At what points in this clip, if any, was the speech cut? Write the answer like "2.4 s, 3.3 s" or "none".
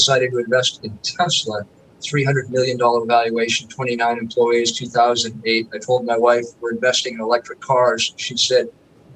none